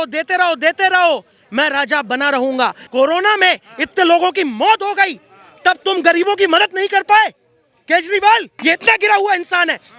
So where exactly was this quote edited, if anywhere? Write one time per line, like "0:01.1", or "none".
0:02.8
0:08.5